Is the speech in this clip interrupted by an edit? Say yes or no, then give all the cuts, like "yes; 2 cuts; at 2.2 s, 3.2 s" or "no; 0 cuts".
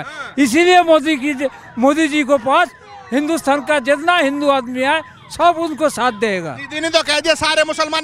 no; 0 cuts